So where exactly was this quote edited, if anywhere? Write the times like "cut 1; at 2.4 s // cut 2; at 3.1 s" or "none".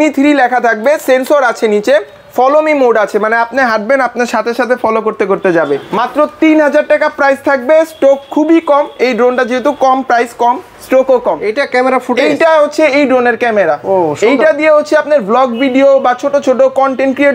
cut 1; at 5.9 s // cut 2; at 11.4 s